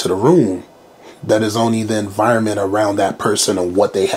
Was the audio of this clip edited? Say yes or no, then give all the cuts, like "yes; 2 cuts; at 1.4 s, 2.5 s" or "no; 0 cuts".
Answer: no; 0 cuts